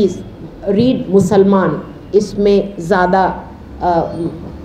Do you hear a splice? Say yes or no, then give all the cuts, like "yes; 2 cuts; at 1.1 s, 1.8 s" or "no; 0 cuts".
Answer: no; 0 cuts